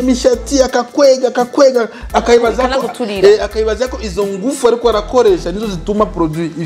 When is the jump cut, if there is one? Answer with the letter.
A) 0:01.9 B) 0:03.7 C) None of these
C